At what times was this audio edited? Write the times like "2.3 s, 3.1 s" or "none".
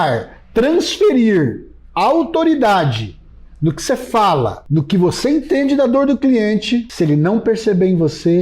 6.9 s